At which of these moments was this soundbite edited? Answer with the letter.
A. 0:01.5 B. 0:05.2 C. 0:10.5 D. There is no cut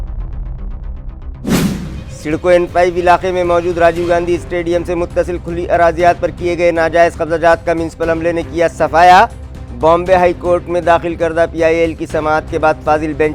A